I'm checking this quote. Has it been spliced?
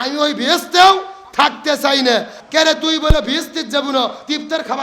yes; 1 cut; at 2.4 s

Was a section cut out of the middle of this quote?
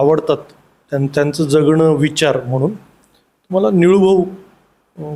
no; 0 cuts

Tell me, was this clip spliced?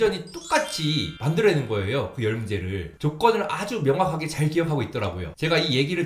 no; 0 cuts

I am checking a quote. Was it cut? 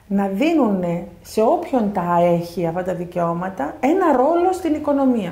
no; 0 cuts

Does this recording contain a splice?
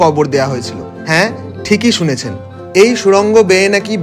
yes; 1 cut; at 2.5 s

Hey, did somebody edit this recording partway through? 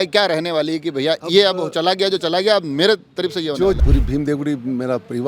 yes; 1 cut; at 3.8 s

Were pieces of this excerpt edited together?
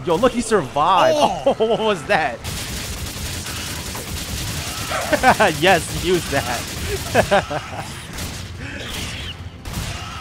yes; 1 cut; at 2.5 s

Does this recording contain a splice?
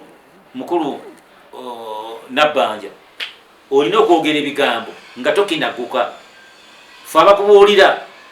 no; 0 cuts

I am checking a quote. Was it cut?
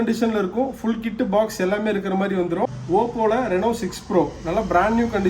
yes; 1 cut; at 2.8 s

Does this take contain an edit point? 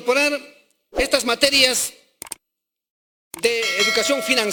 no; 0 cuts

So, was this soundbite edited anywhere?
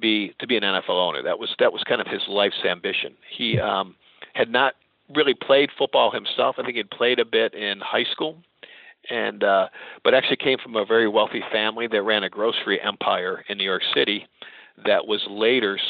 no; 0 cuts

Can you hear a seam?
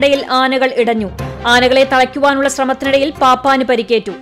no; 0 cuts

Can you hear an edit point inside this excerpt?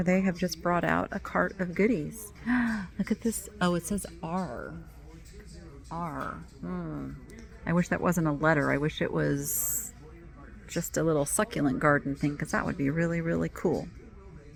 no; 0 cuts

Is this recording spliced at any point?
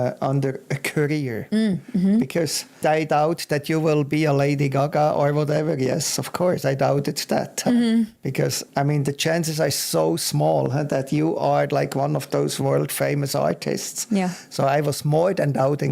yes; 2 cuts; at 2.8 s, 8.6 s

